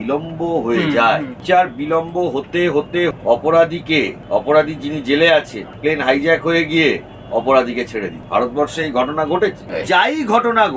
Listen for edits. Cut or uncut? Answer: cut